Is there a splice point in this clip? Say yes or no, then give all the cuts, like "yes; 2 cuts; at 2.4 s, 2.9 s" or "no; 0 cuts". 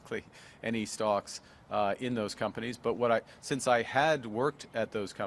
no; 0 cuts